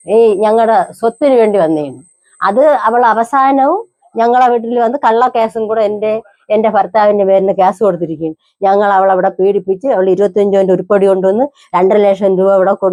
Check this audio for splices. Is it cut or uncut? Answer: uncut